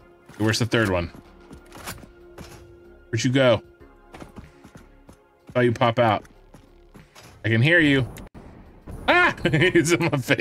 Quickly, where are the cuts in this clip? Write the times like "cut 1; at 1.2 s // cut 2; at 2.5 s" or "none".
cut 1; at 9.2 s

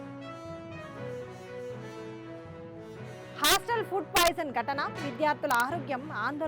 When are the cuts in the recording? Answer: cut 1; at 3.2 s

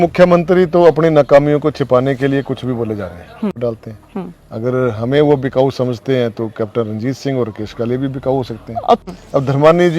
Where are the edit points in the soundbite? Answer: cut 1; at 3.6 s // cut 2; at 9.0 s

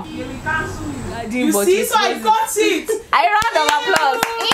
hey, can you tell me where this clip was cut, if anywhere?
cut 1; at 1.3 s

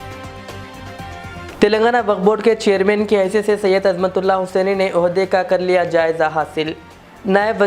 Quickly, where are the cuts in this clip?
cut 1; at 1.5 s

